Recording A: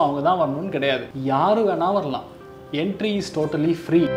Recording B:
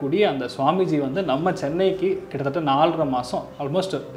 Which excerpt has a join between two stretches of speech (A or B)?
A